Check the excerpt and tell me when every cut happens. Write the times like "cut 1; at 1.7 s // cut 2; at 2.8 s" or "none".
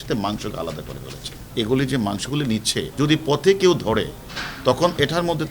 cut 1; at 1.4 s // cut 2; at 2.9 s

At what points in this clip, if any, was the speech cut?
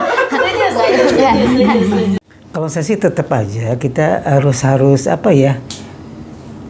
cut 1; at 2.2 s

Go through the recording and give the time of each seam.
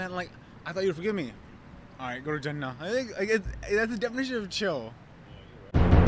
none

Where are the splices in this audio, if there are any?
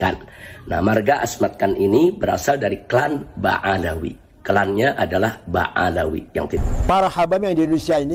cut 1; at 6.6 s

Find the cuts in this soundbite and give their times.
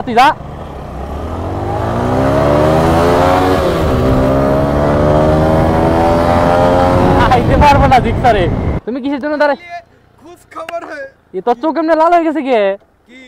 cut 1; at 8.7 s

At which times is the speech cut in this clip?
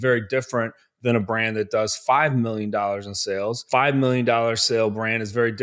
cut 1; at 3.6 s

